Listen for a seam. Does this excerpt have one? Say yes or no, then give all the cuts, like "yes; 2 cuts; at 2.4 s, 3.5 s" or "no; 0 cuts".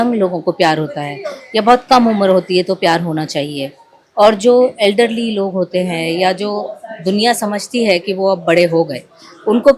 no; 0 cuts